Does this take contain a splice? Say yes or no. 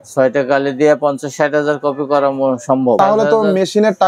yes